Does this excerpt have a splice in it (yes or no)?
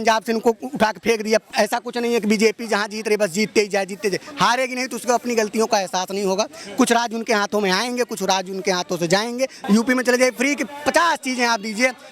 yes